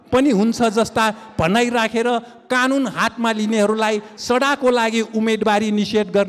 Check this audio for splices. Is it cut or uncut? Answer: uncut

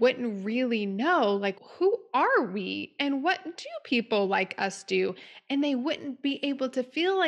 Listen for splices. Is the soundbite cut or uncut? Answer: cut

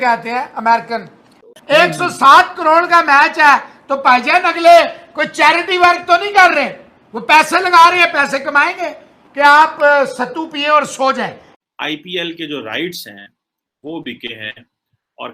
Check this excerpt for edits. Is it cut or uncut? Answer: cut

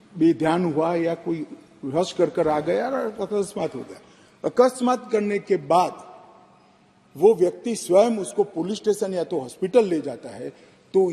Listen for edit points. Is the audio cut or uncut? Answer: uncut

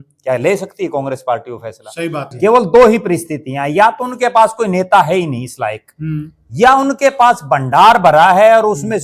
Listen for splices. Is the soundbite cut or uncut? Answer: cut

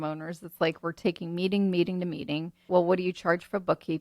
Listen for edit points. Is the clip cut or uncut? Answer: cut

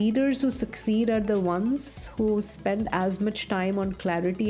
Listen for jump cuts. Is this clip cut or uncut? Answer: uncut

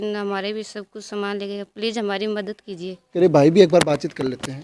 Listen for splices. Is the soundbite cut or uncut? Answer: uncut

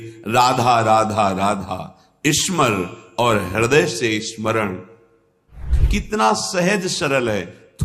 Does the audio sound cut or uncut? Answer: cut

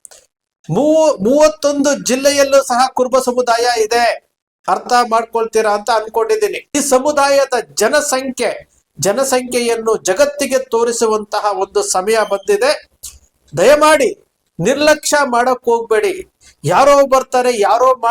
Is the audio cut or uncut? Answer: cut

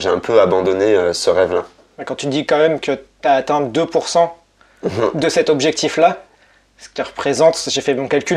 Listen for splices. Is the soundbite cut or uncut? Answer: uncut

